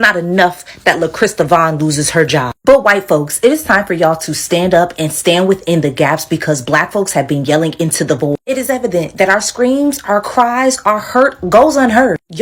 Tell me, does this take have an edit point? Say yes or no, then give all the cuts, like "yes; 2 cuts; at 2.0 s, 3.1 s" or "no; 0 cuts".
no; 0 cuts